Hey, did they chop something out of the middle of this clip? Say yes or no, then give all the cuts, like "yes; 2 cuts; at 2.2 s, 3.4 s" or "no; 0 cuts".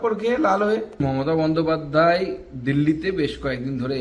yes; 1 cut; at 0.9 s